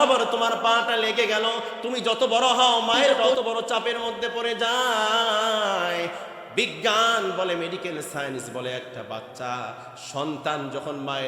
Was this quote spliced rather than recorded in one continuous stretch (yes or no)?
yes